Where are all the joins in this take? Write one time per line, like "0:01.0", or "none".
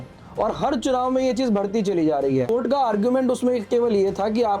0:02.5

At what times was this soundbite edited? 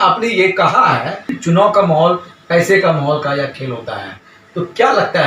0:01.3

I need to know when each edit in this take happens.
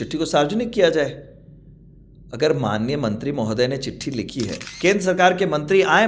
0:04.6

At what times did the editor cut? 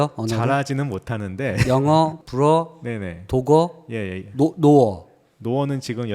0:02.2

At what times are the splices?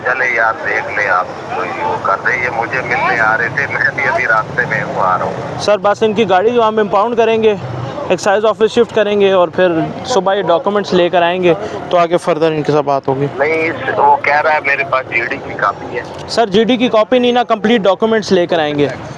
none

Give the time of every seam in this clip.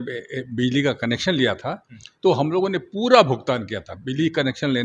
none

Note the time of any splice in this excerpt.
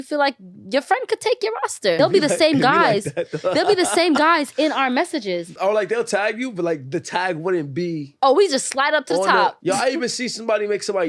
0:02.0
0:05.6
0:08.1
0:09.6

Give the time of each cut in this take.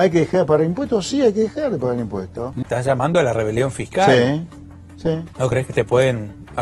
0:02.4
0:05.3

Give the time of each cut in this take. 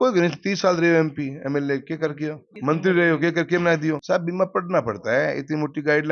0:03.9

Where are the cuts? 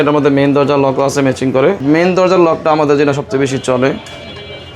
0:01.8

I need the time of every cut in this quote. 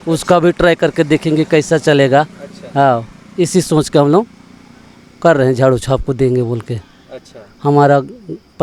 none

